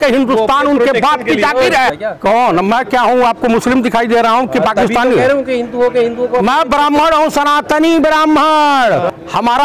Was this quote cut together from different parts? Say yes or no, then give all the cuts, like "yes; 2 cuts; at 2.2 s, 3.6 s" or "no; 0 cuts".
yes; 1 cut; at 1.9 s